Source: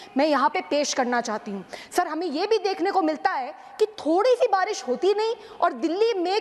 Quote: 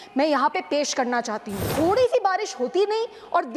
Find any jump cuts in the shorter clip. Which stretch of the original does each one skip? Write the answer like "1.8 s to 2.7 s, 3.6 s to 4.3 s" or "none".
1.7 s to 4.0 s